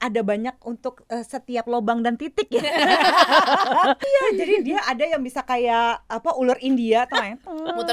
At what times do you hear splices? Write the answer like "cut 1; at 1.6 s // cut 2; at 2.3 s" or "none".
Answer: cut 1; at 4.0 s